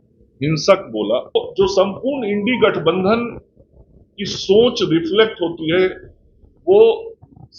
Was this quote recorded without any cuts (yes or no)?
no